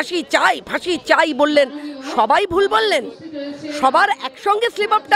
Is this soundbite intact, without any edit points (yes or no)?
yes